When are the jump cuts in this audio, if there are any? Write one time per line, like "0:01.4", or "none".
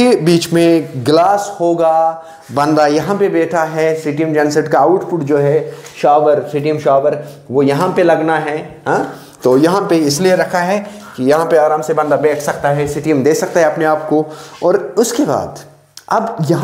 none